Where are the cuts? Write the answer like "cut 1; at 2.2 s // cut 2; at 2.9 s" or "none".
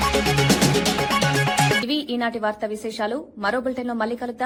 none